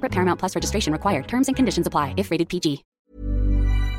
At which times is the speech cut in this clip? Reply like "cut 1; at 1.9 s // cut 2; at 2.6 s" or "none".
cut 1; at 2.9 s

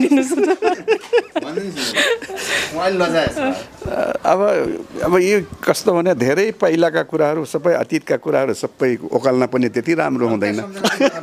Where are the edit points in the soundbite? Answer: none

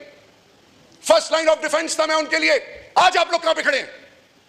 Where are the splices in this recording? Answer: cut 1; at 2.9 s

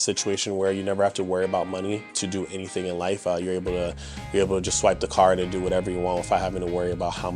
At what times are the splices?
cut 1; at 2.1 s

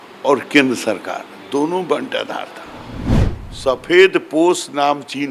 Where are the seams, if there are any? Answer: cut 1; at 3.1 s

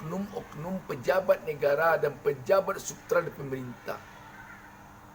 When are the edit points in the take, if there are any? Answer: none

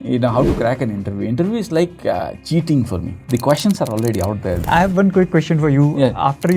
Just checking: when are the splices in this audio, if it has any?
cut 1; at 2.4 s // cut 2; at 3.1 s // cut 3; at 4.7 s

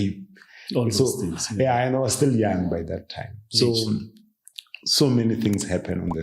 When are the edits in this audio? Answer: none

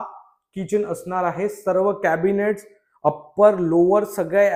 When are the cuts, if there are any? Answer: none

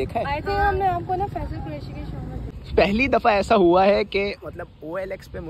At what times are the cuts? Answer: cut 1; at 2.5 s

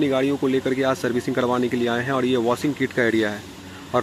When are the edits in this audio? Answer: none

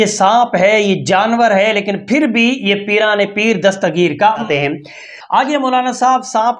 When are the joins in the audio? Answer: cut 1; at 4.4 s

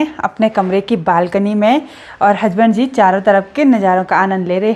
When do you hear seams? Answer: none

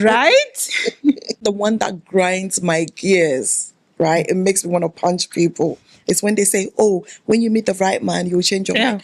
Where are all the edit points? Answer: cut 1; at 1.4 s

